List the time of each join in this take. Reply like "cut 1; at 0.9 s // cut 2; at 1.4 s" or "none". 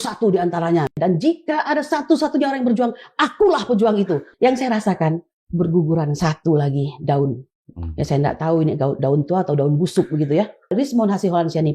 cut 1; at 0.9 s // cut 2; at 4.3 s // cut 3; at 10.7 s